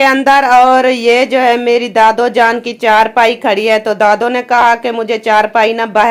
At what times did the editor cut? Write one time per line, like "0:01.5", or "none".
none